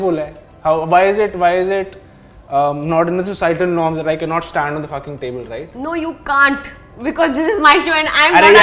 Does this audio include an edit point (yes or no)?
no